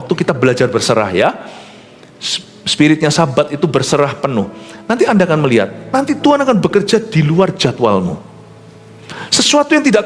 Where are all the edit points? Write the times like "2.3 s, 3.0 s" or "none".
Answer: none